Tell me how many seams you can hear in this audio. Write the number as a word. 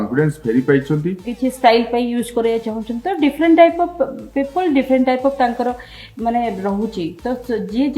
one